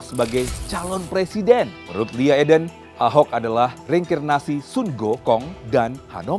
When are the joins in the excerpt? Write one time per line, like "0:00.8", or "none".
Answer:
0:01.8
0:02.8
0:03.8
0:05.5